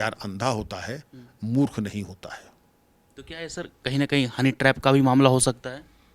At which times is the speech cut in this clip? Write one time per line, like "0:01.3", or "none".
none

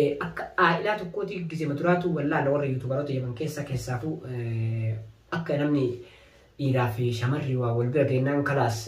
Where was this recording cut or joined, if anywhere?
none

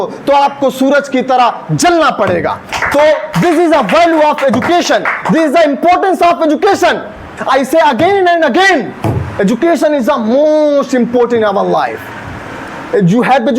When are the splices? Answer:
0:07.3

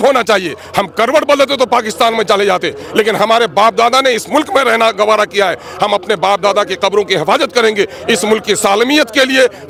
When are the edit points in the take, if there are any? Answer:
none

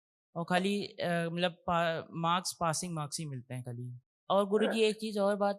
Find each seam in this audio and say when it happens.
0:04.1

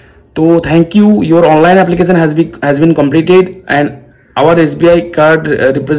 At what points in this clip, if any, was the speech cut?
none

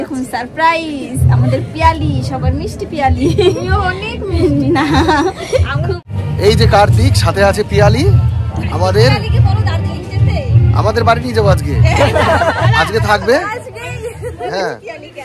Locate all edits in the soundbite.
0:06.0

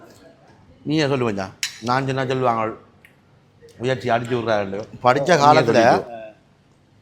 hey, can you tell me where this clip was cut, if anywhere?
0:04.9

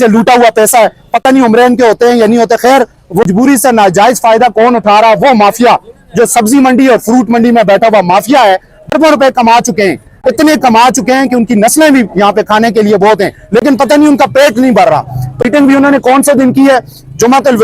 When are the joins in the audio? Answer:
0:03.2
0:08.8
0:15.3

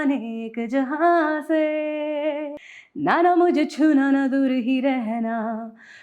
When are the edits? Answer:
0:02.6

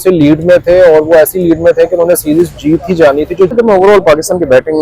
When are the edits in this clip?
0:03.5

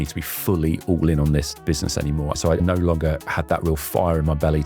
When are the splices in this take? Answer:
0:02.4

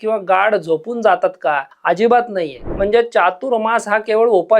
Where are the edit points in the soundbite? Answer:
0:01.7
0:02.6

